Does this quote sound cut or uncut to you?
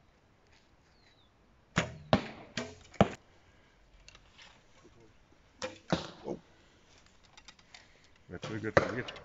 uncut